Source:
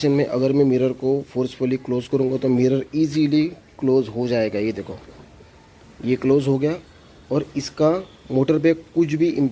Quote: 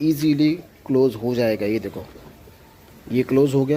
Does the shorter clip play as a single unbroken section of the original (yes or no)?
yes